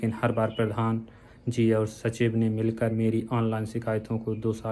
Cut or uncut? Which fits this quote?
uncut